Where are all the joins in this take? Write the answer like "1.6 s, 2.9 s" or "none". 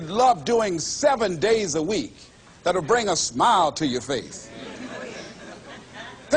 none